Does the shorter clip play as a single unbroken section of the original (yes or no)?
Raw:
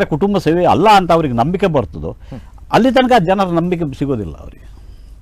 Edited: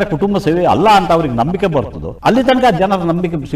no